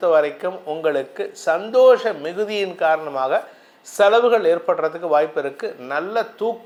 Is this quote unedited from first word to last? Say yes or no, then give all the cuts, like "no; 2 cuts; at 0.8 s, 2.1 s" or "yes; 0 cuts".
yes; 0 cuts